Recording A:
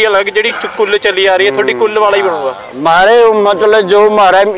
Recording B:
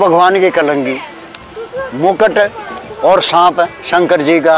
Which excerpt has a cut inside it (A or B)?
B